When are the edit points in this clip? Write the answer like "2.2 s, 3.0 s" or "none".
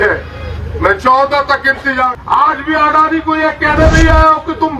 2.1 s